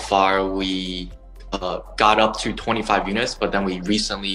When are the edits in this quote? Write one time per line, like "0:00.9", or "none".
none